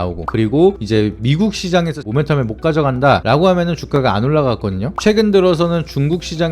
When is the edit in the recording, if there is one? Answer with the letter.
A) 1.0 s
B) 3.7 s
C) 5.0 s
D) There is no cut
C